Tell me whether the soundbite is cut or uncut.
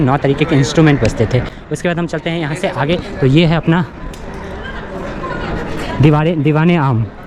uncut